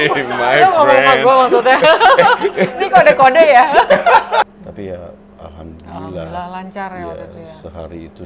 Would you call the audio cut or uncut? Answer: cut